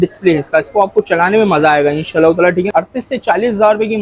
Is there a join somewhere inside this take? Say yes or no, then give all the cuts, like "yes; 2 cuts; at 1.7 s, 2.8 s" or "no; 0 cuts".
yes; 1 cut; at 2.7 s